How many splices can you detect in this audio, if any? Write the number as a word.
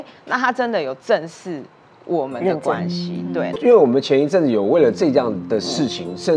one